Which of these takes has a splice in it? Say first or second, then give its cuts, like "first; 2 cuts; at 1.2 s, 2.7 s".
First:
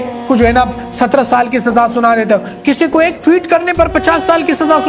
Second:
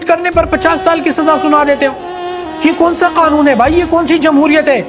second; 1 cut; at 3.9 s